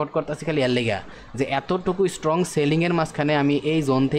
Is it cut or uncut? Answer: uncut